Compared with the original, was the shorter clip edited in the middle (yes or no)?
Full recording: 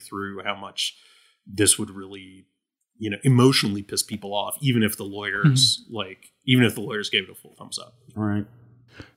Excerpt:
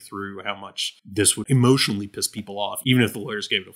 yes